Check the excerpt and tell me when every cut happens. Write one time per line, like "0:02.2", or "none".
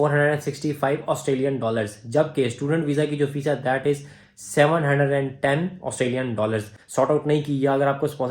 0:06.8